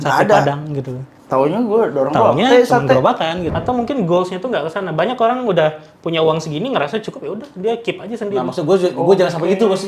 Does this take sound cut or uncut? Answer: cut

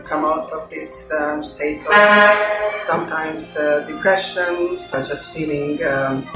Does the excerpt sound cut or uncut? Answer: cut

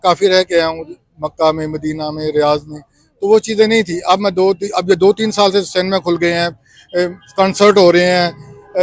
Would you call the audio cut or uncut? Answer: uncut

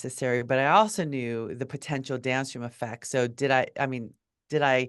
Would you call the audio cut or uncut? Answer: uncut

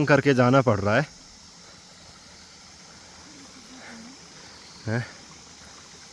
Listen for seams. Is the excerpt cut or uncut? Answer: uncut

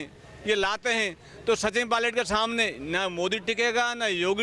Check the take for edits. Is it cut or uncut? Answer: uncut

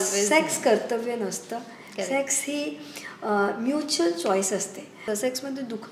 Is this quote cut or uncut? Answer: cut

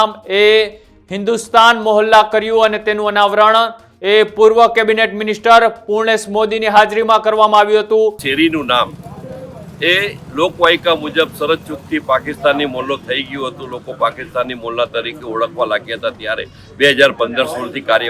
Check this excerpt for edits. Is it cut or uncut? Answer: cut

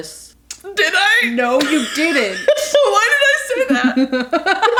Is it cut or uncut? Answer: uncut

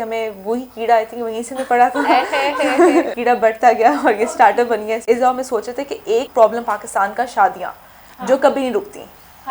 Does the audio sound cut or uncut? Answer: cut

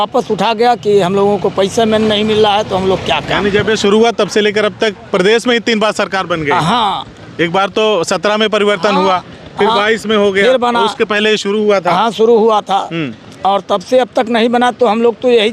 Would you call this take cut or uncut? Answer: uncut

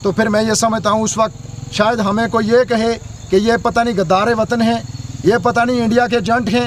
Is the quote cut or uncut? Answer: uncut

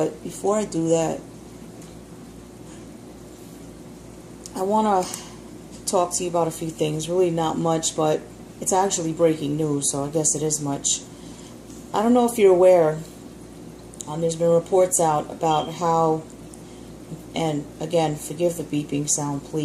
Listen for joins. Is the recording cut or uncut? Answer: cut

